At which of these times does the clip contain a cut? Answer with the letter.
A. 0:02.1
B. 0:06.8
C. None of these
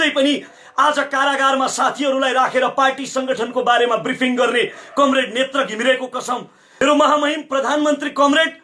B